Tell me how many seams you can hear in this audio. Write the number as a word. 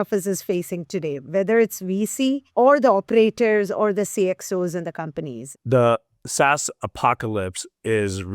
one